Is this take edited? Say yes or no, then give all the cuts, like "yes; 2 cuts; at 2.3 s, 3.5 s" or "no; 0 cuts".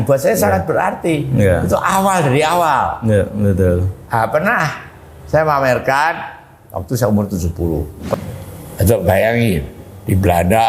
yes; 1 cut; at 8.2 s